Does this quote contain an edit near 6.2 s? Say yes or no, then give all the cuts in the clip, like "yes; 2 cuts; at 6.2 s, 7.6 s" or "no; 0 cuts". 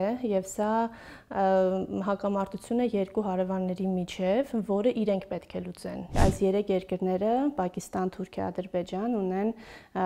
yes; 1 cut; at 6.2 s